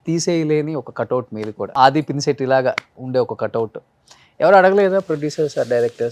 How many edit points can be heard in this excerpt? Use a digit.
2